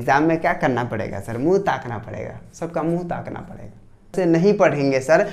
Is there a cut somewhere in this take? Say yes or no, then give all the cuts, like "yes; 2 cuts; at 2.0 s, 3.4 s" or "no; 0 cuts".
yes; 1 cut; at 4.1 s